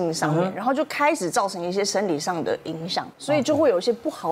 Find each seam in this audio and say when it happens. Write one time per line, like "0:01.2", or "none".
0:03.1